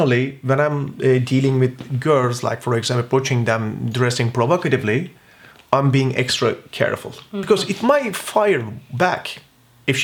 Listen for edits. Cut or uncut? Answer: uncut